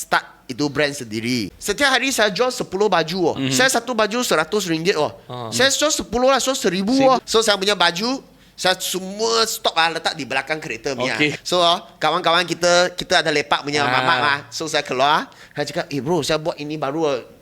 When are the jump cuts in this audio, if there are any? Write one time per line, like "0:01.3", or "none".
0:01.5
0:03.4
0:07.2
0:11.4